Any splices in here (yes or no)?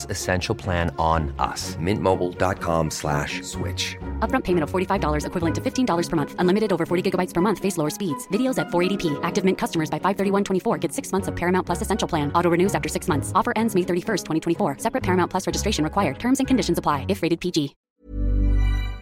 yes